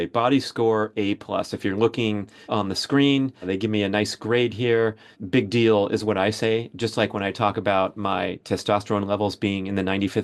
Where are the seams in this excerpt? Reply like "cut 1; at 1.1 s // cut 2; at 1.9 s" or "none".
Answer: cut 1; at 2.3 s // cut 2; at 3.4 s // cut 3; at 5.1 s